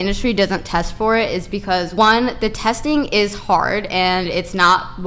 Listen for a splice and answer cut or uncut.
cut